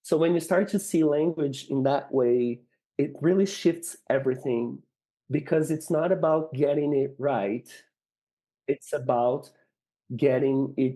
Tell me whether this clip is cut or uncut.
uncut